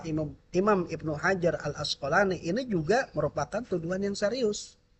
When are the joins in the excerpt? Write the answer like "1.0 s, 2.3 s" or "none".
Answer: none